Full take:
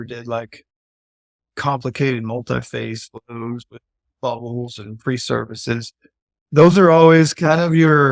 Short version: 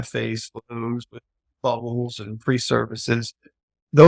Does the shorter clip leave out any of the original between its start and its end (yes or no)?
no